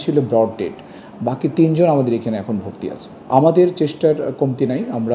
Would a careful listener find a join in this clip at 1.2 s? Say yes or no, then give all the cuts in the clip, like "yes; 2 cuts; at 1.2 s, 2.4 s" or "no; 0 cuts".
no; 1 cut; at 3.3 s